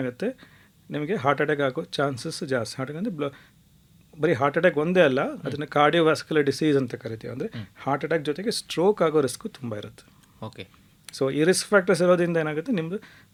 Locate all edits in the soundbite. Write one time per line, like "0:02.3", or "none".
none